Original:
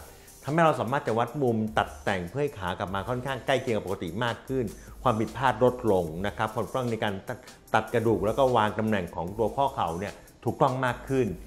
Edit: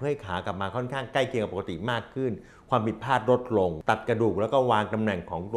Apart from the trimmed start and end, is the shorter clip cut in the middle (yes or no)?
yes